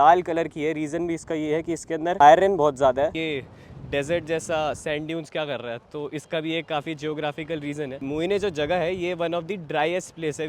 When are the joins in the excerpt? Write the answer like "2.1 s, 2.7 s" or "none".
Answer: 3.1 s